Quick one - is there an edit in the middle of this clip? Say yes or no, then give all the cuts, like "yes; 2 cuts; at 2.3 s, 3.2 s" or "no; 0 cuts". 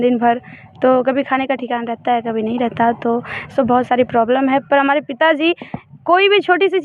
no; 0 cuts